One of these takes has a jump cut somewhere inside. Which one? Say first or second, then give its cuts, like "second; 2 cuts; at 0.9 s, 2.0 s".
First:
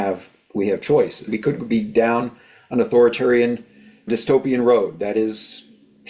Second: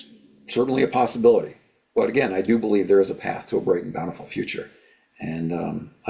first; 2 cuts; at 1.3 s, 4.0 s